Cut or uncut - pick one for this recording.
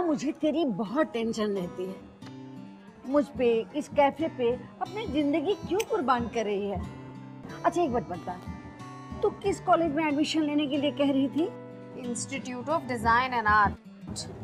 uncut